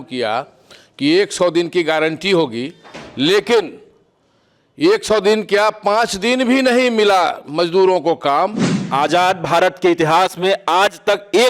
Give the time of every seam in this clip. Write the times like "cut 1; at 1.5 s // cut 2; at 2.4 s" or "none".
cut 1; at 8.8 s